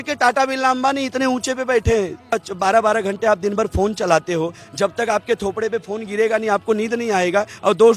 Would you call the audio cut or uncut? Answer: cut